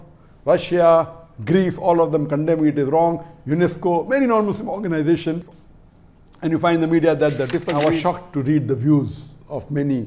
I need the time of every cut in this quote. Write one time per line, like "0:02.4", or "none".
0:07.7